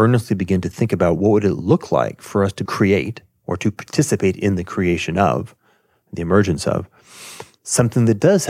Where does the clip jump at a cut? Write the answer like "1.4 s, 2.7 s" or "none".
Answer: 2.7 s